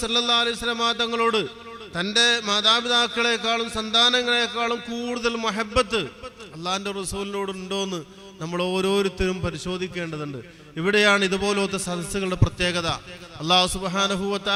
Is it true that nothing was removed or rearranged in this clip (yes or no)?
yes